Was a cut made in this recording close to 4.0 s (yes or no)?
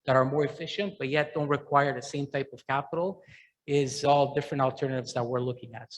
yes